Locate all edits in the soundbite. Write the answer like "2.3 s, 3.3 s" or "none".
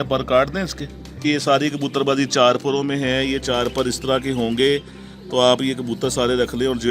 1.2 s